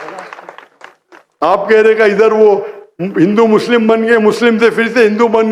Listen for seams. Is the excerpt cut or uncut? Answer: cut